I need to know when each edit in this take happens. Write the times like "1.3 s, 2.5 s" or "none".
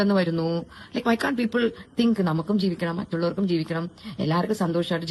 none